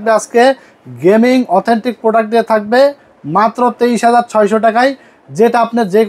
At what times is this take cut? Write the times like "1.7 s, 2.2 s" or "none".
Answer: none